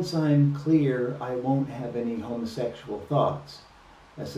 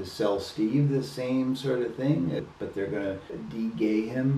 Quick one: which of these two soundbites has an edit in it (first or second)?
second